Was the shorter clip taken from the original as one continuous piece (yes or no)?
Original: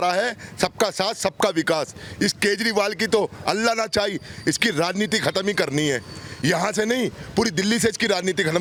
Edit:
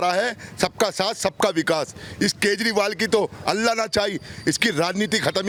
yes